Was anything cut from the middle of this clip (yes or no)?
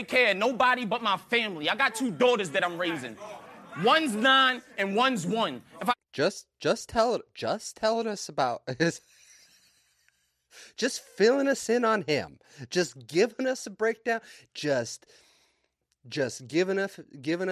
yes